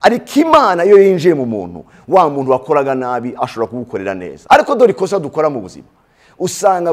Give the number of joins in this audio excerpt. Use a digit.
1